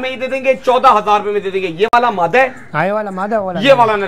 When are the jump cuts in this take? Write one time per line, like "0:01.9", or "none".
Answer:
none